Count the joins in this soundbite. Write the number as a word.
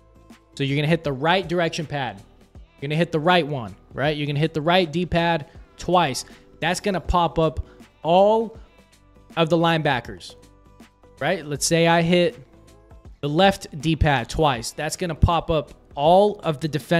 zero